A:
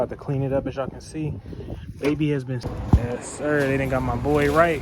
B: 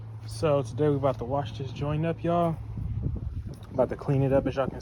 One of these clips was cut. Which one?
A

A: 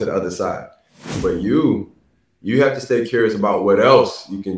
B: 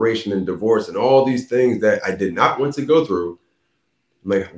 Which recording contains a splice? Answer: A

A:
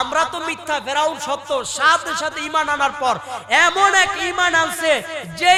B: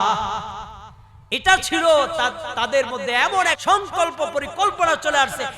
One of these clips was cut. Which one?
B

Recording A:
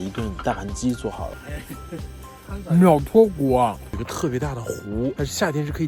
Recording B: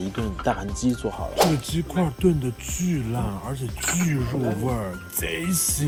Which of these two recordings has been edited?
A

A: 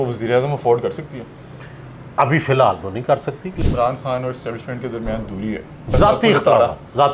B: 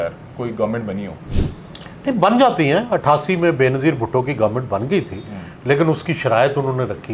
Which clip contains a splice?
A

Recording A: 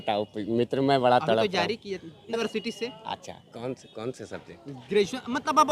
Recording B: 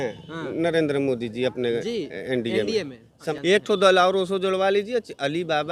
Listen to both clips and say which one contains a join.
A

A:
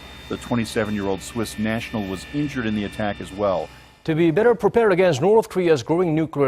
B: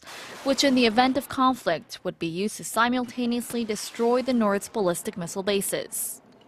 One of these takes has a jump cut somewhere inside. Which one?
A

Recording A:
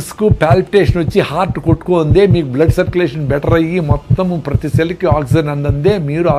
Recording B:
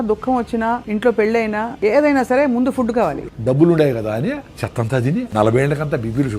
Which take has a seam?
B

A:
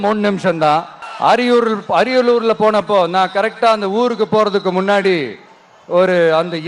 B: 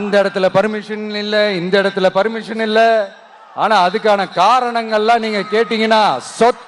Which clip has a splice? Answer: A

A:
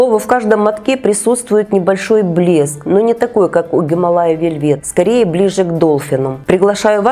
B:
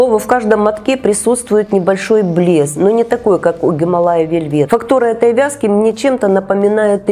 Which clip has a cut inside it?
B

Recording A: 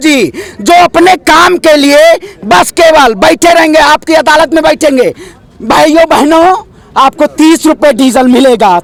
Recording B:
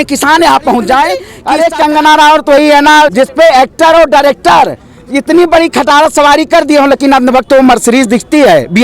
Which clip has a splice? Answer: B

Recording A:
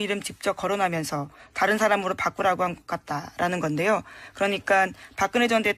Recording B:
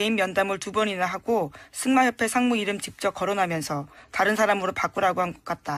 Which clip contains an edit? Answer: A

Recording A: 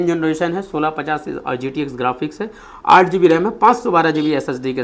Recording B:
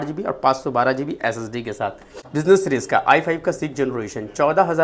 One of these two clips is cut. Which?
B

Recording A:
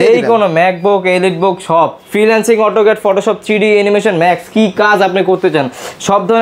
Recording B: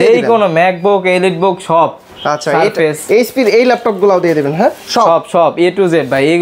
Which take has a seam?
A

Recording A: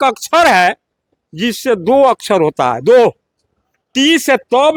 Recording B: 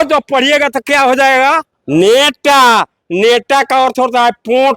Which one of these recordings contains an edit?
B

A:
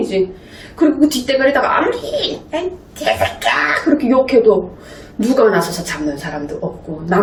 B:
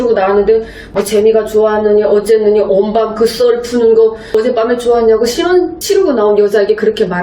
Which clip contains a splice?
B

